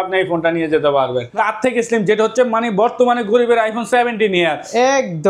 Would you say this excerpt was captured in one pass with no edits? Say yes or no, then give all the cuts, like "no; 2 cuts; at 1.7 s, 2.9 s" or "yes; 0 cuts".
no; 1 cut; at 1.3 s